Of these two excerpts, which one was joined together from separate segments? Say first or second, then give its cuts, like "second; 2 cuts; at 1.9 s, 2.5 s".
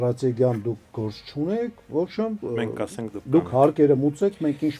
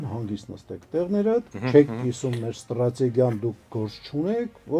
second; 1 cut; at 1.6 s